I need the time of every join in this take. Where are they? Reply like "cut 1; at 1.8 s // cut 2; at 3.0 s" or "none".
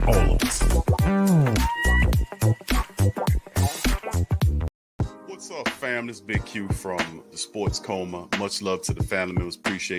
cut 1; at 4.9 s